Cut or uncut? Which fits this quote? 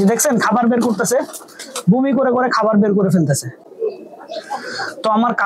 uncut